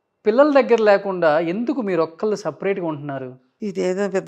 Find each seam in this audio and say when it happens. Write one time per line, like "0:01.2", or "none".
none